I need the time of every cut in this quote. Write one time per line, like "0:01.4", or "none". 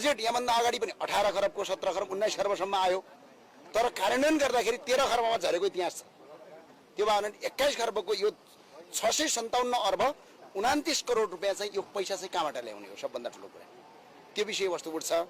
none